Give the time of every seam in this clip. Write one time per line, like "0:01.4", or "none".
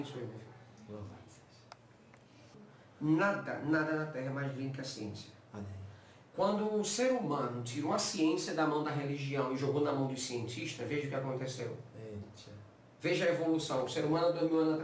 0:02.6